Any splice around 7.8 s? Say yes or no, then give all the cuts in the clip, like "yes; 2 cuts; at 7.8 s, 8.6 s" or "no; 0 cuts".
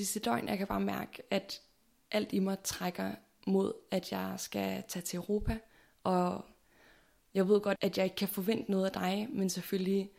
yes; 1 cut; at 7.8 s